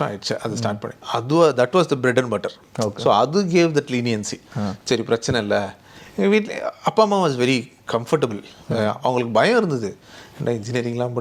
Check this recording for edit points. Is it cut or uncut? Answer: uncut